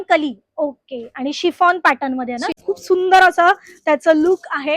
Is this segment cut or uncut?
cut